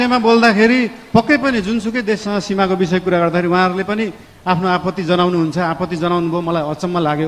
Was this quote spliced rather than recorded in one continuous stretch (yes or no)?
no